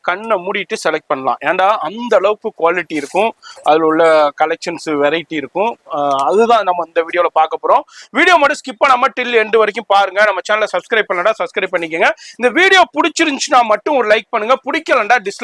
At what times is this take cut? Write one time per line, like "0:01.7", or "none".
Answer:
none